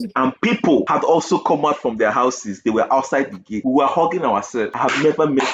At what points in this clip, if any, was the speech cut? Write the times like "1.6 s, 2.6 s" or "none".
0.9 s, 3.5 s, 4.7 s